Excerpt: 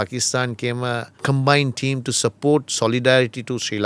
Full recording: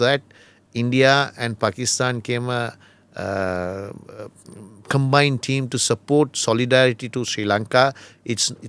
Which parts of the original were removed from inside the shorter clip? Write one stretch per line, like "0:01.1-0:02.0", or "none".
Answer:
0:02.8-0:04.8